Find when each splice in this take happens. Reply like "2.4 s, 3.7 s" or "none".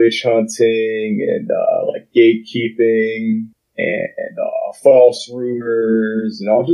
3.6 s